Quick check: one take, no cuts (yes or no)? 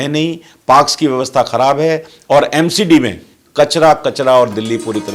yes